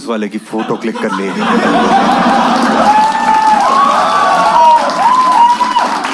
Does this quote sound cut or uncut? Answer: uncut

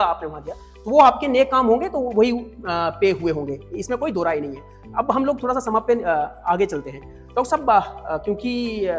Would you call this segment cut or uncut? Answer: uncut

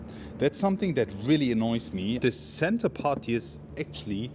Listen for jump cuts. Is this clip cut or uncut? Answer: cut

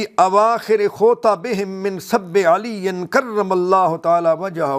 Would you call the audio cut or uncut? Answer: cut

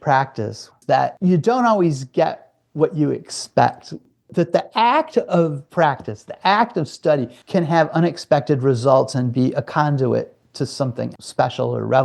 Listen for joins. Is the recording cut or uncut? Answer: cut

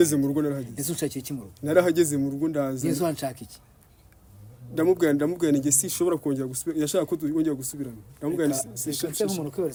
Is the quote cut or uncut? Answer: uncut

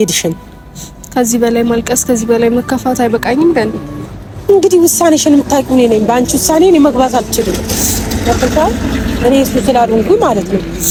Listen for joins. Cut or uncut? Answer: uncut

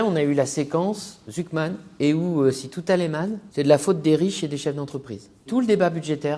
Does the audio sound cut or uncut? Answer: cut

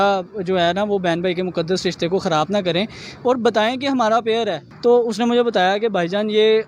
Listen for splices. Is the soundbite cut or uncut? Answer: uncut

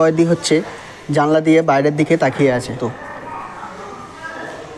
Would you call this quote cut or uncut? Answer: cut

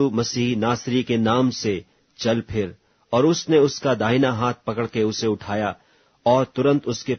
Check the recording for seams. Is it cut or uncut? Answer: cut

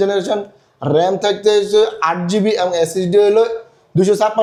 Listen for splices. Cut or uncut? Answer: uncut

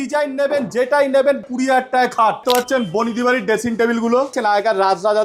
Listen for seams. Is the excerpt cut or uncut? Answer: cut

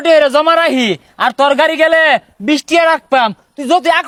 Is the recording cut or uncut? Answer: uncut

